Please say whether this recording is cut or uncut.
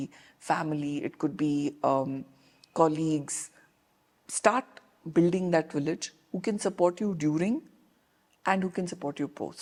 uncut